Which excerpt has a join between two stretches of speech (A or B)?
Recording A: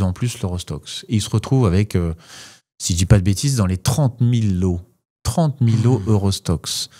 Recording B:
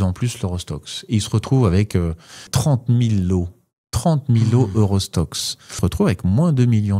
B